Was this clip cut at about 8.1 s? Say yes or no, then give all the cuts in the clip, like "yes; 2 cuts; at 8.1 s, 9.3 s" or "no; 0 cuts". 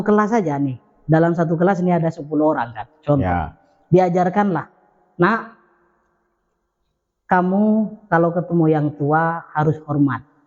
no; 0 cuts